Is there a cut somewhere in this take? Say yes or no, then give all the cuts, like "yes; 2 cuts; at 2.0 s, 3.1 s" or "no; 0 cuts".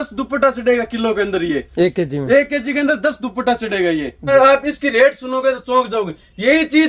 yes; 1 cut; at 4.3 s